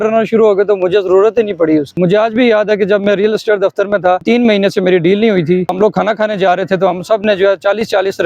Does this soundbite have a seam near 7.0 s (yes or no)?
no